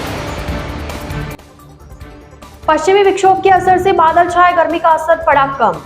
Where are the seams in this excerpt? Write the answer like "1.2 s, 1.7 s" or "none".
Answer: 2.6 s